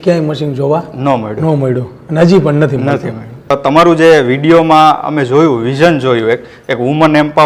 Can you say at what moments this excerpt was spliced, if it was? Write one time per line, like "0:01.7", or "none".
0:03.5